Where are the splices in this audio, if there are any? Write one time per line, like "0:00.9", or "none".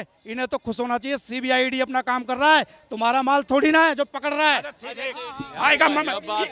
none